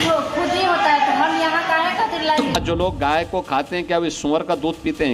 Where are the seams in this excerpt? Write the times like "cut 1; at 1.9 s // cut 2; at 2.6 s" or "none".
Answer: cut 1; at 2.6 s